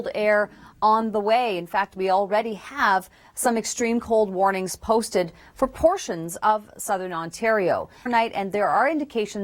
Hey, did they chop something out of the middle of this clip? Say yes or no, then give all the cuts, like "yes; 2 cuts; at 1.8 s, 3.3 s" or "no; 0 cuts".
yes; 1 cut; at 8.1 s